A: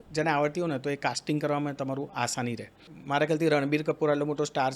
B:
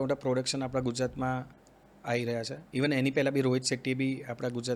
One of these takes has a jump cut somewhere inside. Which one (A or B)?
A